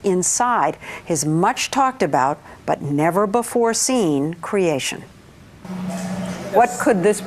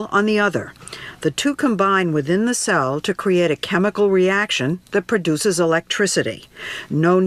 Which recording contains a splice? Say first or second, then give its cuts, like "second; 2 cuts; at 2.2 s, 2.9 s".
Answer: first; 1 cut; at 1.7 s